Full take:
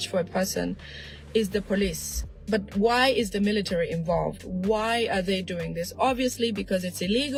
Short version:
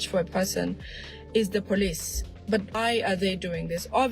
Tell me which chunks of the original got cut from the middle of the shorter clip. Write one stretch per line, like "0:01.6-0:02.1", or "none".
0:02.7-0:04.8

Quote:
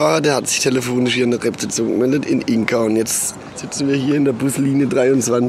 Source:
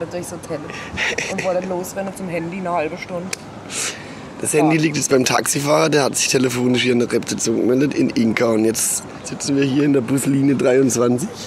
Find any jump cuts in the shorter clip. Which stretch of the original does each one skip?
none

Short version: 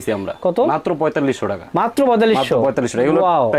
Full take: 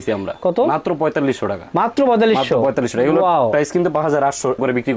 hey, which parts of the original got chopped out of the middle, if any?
none

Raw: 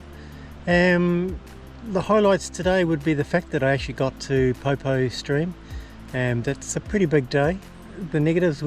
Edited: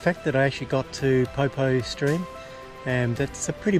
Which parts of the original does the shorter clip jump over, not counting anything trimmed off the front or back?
none

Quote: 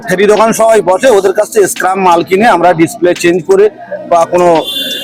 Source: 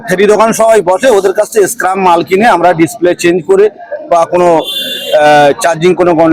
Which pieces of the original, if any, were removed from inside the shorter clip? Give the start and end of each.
none

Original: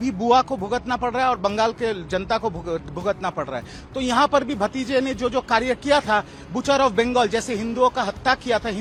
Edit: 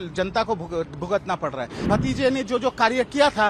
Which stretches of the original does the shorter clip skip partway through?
0:03.8-0:04.5

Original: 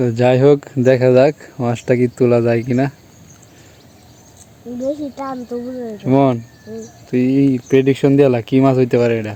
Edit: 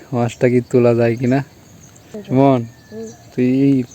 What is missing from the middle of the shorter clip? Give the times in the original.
0:03.6-0:05.9

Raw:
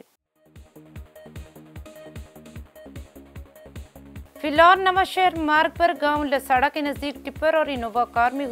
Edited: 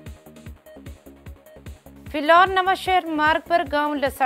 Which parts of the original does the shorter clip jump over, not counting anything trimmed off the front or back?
0:04.2-0:04.4

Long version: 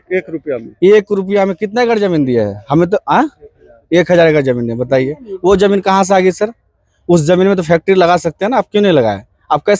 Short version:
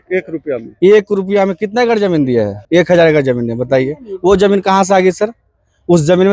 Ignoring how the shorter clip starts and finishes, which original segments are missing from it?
0:02.6-0:03.8

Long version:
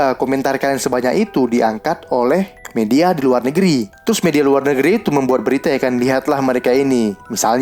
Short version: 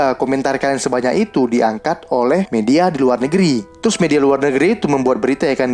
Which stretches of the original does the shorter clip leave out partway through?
0:02.5-0:02.7

